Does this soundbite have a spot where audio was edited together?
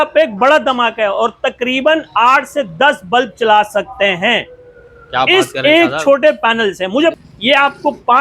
yes; 1 cut; at 7.1 s

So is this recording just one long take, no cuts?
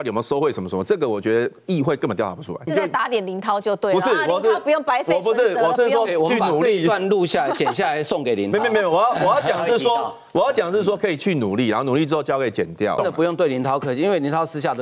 no; 2 cuts; at 2.7 s, 13.0 s

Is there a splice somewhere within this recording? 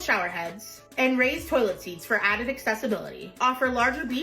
yes; 1 cut; at 3.2 s

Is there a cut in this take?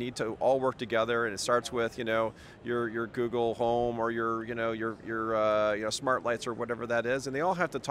no; 0 cuts

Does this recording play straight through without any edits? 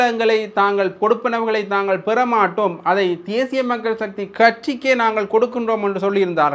yes; 0 cuts

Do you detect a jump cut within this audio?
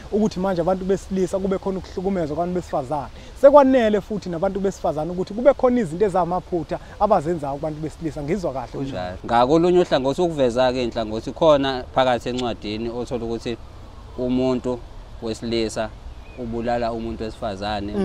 yes; 1 cut; at 9.2 s

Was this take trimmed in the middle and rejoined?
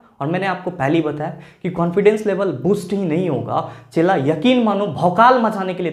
no; 0 cuts

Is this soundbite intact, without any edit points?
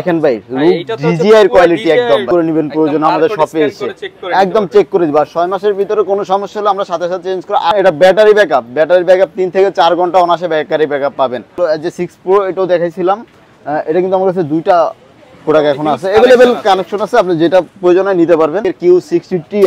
no; 4 cuts; at 2.3 s, 7.7 s, 11.6 s, 18.7 s

